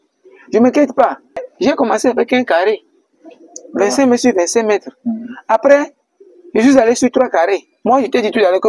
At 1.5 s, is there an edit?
yes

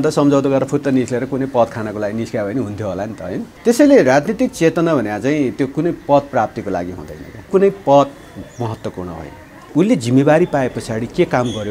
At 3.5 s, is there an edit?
yes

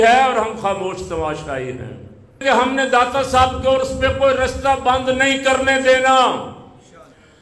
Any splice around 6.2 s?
no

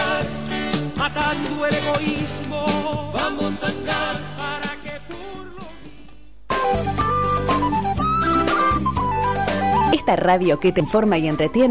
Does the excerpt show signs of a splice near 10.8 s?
yes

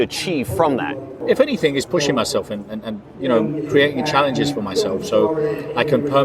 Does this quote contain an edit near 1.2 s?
yes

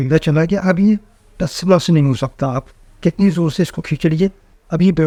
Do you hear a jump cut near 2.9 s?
no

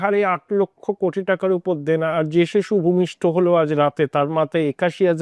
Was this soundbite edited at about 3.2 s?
no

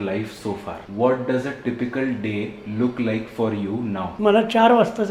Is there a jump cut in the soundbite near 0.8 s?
yes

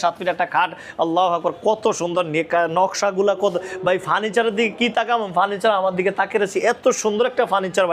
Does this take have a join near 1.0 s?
no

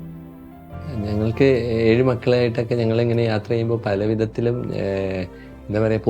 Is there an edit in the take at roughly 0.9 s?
yes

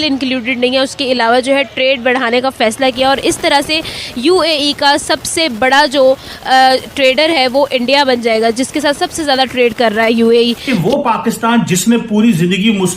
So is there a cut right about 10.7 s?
yes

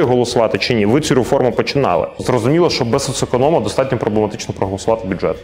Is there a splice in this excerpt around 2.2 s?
yes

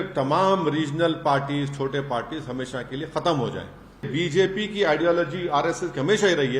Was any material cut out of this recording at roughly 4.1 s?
yes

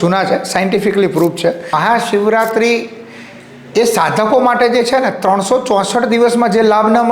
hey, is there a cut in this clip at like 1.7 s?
yes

